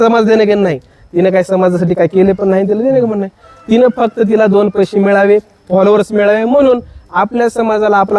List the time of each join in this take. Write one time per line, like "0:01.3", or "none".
none